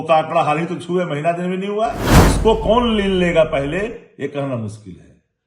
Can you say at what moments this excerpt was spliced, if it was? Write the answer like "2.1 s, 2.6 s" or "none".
2.1 s